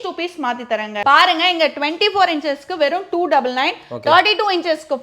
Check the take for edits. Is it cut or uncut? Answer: cut